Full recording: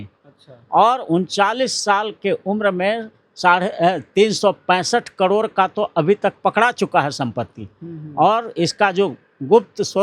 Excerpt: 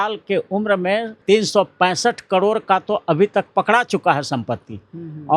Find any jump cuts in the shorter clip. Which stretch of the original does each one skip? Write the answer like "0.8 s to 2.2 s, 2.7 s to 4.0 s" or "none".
3.1 s to 4.0 s